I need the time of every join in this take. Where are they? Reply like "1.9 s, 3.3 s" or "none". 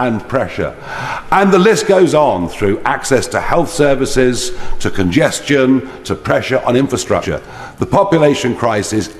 7.3 s